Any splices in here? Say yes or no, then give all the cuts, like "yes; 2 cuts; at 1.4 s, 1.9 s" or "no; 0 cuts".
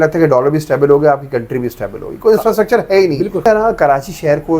yes; 1 cut; at 3.4 s